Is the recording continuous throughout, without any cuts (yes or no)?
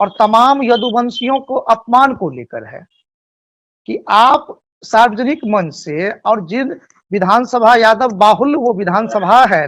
yes